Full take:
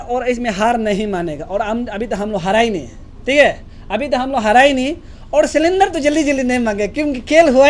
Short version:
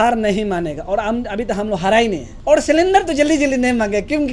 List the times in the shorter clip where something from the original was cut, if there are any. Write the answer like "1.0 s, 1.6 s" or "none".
2.3 s